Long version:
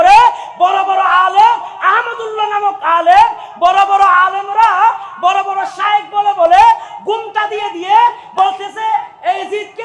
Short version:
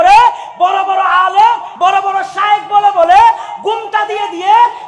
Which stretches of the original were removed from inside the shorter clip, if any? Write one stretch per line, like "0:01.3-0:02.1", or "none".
0:01.7-0:05.1